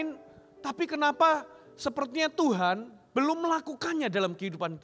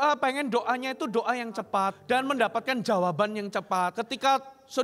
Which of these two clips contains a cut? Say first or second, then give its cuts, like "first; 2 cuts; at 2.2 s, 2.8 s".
second; 2 cuts; at 2.0 s, 4.0 s